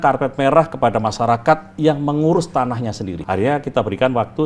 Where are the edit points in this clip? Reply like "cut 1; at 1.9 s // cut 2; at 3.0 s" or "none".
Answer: cut 1; at 3.2 s